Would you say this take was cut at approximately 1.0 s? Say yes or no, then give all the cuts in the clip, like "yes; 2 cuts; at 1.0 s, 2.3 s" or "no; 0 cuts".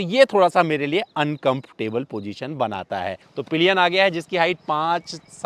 no; 1 cut; at 3.2 s